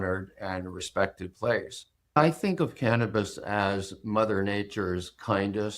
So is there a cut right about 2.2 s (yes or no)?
yes